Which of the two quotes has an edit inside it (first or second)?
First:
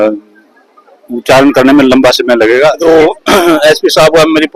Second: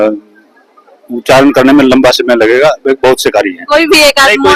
first